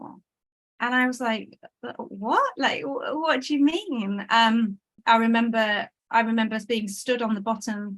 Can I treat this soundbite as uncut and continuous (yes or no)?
no